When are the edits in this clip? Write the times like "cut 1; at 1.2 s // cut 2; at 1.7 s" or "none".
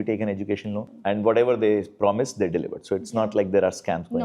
cut 1; at 0.9 s